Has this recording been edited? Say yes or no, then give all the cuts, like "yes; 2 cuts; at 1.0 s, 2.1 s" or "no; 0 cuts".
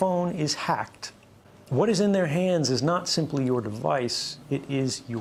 no; 0 cuts